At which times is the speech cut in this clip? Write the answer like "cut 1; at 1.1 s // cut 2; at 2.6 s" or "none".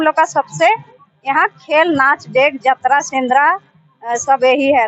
none